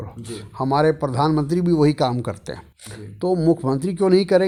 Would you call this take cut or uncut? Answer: uncut